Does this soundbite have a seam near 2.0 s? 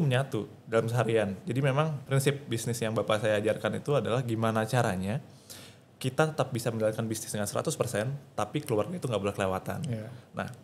yes; 1 cut; at 2.0 s

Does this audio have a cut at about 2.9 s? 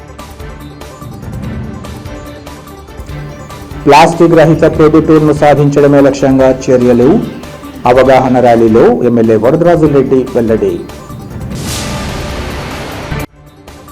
no; 1 cut; at 0.9 s

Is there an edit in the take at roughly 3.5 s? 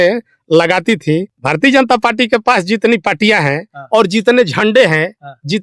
no; 1 cut; at 1.3 s

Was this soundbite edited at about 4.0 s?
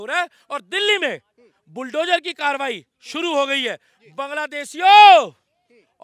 no; 0 cuts

